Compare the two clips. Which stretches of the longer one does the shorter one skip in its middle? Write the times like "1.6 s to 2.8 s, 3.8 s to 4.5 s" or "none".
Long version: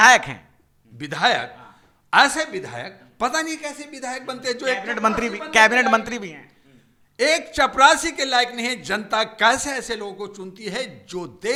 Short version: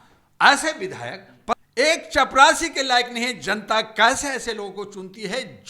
3.3 s to 7.0 s